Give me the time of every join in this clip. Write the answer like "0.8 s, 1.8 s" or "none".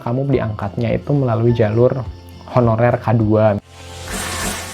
3.7 s